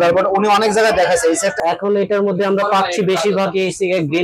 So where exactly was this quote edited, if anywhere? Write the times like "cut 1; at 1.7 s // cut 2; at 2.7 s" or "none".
cut 1; at 1.6 s